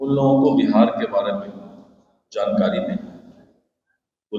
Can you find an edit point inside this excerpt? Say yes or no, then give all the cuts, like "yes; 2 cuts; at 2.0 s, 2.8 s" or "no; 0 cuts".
no; 0 cuts